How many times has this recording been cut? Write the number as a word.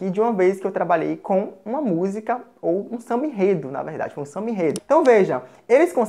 one